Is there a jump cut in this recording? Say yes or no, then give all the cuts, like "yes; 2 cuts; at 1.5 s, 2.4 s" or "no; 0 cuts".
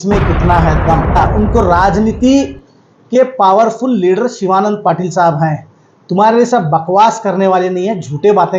yes; 1 cut; at 1.2 s